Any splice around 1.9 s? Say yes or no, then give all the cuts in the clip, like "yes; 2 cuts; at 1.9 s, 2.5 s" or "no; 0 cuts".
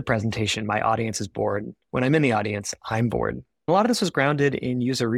no; 1 cut; at 3.7 s